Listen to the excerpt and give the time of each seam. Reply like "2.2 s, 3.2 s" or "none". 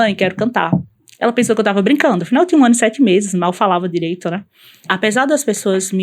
4.9 s